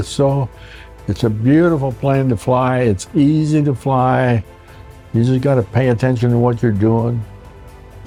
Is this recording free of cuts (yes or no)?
yes